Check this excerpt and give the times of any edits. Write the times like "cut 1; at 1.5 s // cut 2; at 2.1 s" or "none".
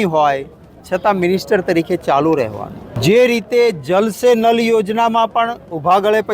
cut 1; at 2.9 s